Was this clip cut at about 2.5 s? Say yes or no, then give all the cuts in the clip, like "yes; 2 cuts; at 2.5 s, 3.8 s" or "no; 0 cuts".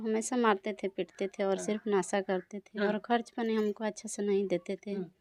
no; 0 cuts